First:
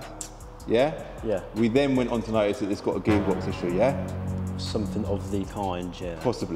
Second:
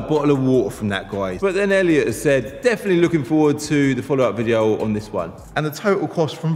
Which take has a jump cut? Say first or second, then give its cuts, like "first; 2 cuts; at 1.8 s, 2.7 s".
second; 1 cut; at 5.4 s